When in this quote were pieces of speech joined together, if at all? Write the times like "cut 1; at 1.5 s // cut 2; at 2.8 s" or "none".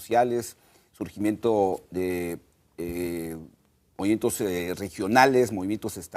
cut 1; at 3.6 s